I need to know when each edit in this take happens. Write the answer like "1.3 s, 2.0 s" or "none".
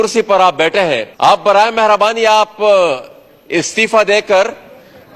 1.1 s